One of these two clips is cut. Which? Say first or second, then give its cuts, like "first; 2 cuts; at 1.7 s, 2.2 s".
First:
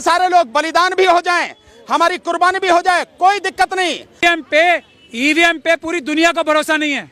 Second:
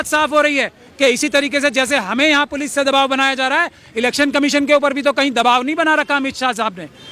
first; 1 cut; at 4.2 s